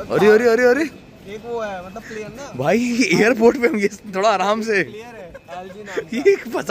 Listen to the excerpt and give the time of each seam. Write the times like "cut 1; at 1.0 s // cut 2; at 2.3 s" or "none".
none